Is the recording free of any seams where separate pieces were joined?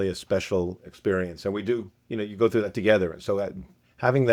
yes; 0 cuts

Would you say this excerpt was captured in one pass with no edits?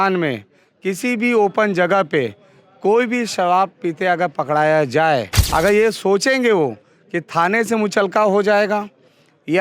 no; 1 cut; at 5.4 s

